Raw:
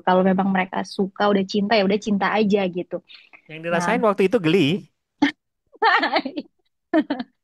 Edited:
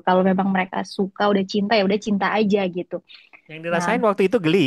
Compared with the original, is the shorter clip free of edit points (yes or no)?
yes